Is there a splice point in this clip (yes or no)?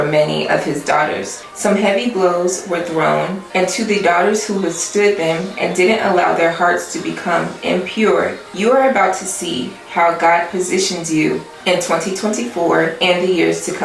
yes